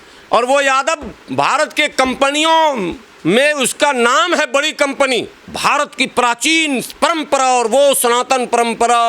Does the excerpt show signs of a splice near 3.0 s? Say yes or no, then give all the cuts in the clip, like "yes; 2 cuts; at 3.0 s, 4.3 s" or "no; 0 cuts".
no; 1 cut; at 5.4 s